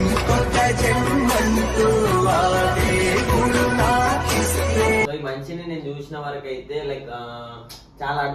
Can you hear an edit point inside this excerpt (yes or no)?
yes